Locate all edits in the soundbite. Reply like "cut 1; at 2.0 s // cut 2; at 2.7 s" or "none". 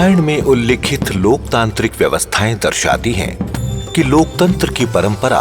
none